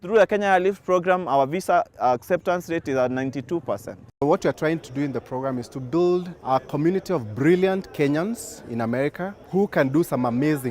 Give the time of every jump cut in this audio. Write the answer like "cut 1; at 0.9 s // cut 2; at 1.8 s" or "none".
cut 1; at 4.2 s // cut 2; at 6.3 s // cut 3; at 9.4 s